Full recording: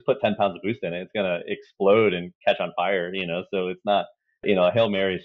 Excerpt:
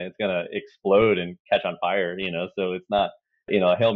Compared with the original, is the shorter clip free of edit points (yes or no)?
yes